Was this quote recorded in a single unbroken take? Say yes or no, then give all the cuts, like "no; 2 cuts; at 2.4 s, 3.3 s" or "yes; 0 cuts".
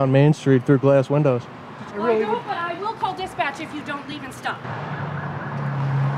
no; 2 cuts; at 1.8 s, 4.7 s